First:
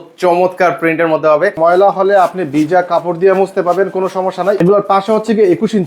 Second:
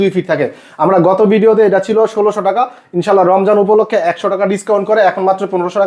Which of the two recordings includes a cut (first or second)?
first